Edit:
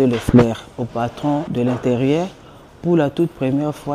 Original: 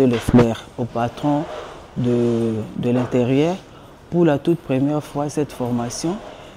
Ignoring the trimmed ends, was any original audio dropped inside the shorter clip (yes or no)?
yes